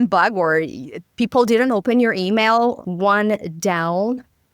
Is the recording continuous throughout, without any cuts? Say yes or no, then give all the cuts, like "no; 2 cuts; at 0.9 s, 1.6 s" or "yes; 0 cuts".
no; 1 cut; at 2.8 s